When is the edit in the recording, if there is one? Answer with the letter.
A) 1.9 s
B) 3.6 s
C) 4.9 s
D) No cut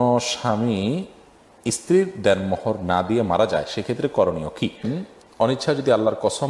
C